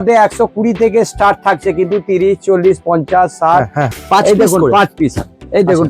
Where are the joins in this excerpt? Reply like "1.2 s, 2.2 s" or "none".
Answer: 4.0 s